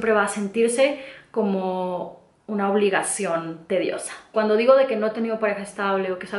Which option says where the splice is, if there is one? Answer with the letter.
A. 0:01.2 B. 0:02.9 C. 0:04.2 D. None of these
C